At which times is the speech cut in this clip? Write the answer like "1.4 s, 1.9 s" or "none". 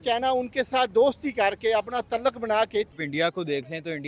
2.9 s